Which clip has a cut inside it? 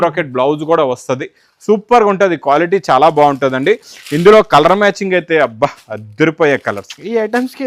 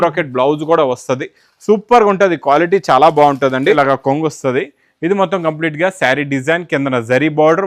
second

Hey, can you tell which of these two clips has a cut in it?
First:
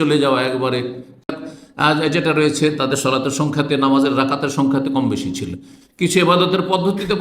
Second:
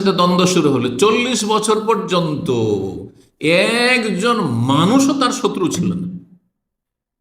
first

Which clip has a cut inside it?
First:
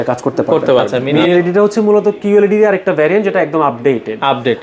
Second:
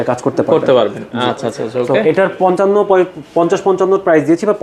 first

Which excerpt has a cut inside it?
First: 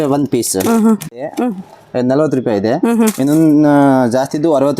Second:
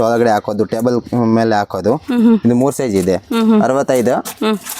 first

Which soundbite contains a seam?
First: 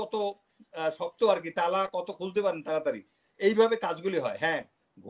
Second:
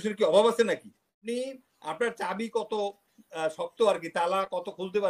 second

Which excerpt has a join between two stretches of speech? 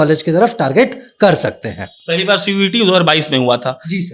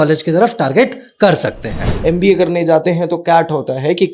second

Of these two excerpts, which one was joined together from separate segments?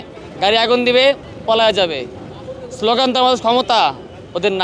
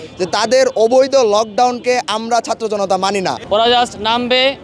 second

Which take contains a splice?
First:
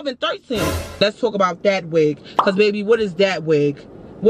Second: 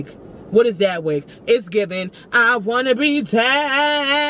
first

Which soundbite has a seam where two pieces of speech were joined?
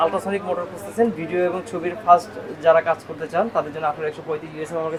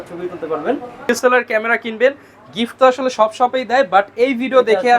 second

